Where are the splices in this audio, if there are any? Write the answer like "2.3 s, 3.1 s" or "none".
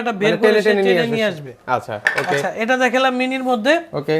none